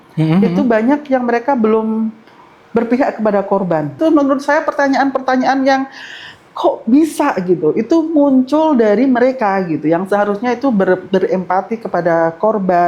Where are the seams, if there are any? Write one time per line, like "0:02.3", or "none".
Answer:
0:04.0